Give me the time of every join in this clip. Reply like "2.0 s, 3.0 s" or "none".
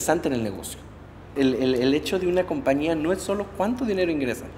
1.3 s